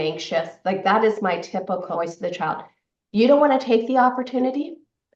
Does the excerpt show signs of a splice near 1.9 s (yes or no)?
yes